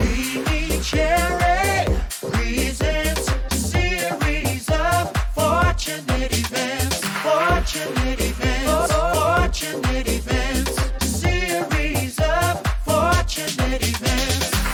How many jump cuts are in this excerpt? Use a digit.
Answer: 0